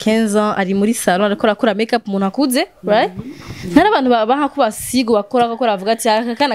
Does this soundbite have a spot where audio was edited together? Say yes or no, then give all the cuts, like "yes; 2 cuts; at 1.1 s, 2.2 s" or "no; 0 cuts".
no; 0 cuts